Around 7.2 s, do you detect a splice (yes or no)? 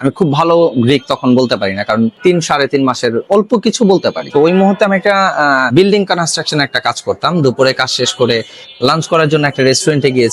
no